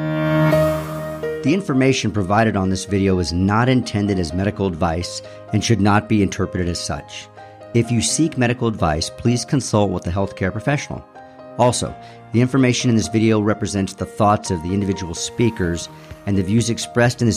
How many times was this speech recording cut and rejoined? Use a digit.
1